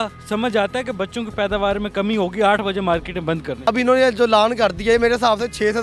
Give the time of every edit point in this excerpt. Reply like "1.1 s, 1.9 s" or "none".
3.6 s